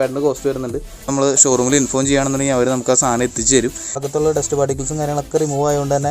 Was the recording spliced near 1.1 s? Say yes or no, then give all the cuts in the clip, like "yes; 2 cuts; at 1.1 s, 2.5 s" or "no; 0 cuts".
yes; 2 cuts; at 1.1 s, 4.0 s